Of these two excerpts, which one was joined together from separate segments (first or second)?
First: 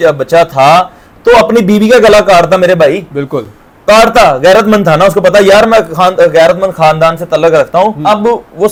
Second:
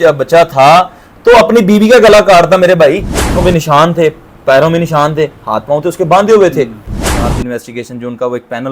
second